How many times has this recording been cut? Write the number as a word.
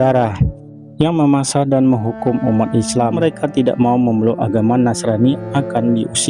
one